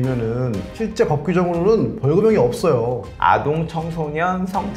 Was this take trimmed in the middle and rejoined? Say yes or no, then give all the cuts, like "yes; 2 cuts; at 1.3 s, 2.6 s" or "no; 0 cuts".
yes; 1 cut; at 3.1 s